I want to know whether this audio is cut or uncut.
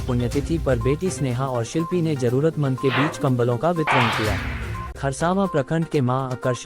cut